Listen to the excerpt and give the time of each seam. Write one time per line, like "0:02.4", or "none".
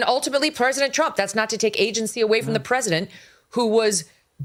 none